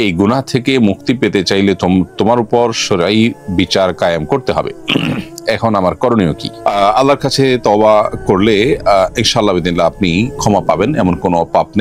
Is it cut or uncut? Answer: uncut